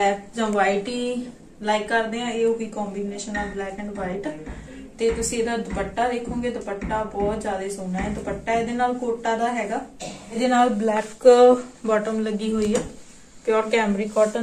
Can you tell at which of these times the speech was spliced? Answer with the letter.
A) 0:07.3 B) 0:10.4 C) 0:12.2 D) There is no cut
B